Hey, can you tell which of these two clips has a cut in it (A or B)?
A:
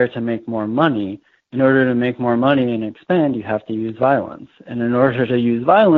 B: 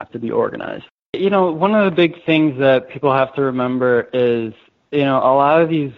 B